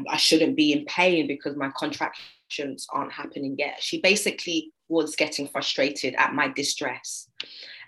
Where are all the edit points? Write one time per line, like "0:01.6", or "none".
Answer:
none